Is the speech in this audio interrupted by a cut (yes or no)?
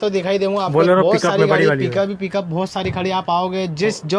no